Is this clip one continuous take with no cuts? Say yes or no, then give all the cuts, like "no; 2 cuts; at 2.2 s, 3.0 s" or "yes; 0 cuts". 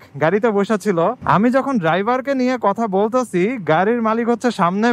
no; 1 cut; at 1.2 s